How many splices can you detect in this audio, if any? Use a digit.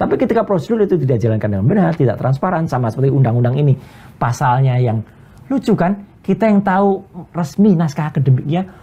0